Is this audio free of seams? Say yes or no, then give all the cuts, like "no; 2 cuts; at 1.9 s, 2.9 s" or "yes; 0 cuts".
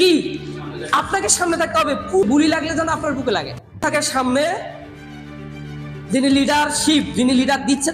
no; 2 cuts; at 2.2 s, 3.8 s